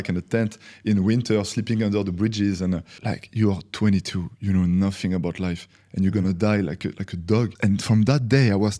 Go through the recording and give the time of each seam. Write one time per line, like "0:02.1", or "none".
0:02.9
0:07.5